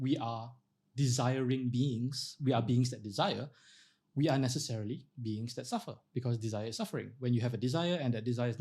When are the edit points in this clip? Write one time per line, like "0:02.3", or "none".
none